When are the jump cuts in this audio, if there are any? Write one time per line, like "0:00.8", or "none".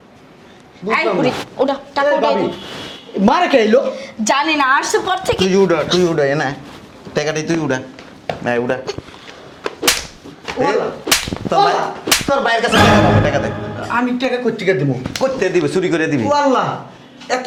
none